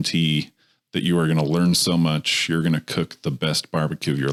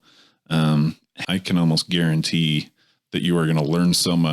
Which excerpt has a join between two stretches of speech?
second; 1 cut; at 1.2 s

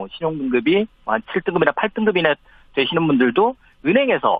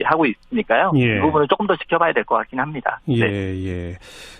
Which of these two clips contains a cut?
second; 1 cut; at 1.3 s

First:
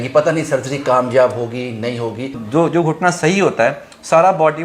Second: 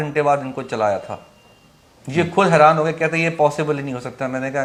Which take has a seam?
first; 1 cut; at 2.4 s

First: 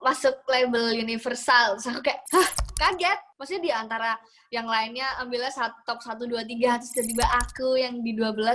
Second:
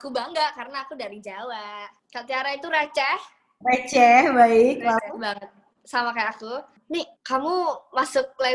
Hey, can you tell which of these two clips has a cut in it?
second; 1 cut; at 6.7 s

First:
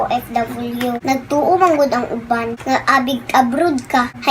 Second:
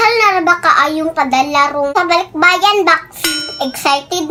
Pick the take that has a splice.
first; 1 cut; at 1.0 s

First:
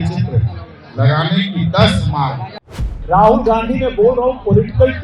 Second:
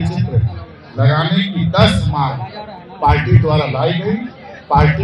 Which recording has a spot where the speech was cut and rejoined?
first; 1 cut; at 2.8 s

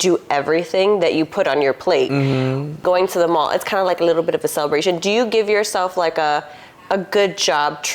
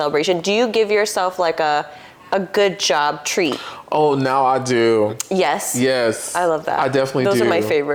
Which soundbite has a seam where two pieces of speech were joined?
first; 1 cut; at 2.8 s

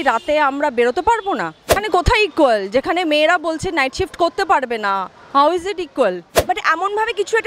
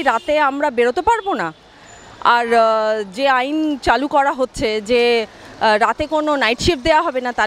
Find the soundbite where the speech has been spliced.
first; 2 cuts; at 1.8 s, 6.3 s

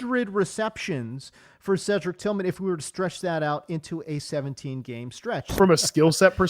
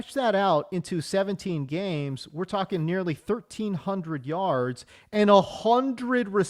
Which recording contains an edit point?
first; 1 cut; at 5.5 s

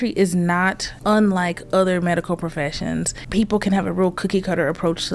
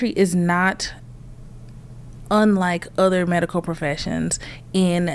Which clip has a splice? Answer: first; 2 cuts; at 0.9 s, 3.2 s

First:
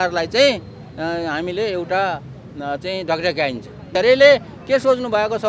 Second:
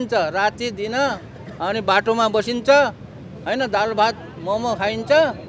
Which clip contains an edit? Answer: first; 1 cut; at 3.9 s

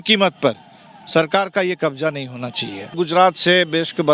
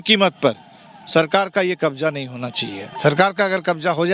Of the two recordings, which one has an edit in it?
first; 1 cut; at 2.9 s

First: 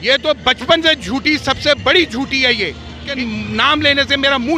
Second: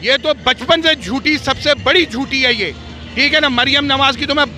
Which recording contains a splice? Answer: first; 1 cut; at 3.1 s

